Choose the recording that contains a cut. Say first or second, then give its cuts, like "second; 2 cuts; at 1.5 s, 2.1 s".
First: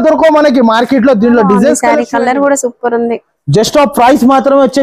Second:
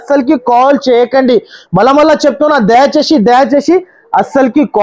first; 1 cut; at 1.8 s